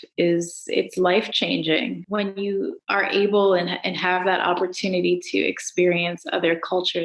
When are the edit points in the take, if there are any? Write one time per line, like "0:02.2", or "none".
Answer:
0:02.0
0:02.8